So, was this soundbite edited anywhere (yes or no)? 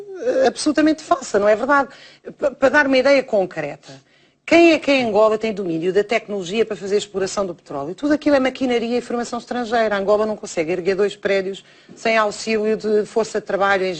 no